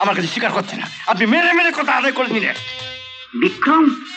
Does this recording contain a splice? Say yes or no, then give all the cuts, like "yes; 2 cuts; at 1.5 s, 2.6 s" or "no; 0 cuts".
no; 0 cuts